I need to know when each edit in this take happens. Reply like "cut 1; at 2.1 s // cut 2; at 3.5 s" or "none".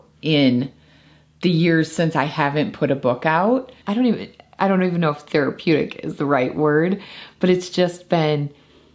cut 1; at 3.8 s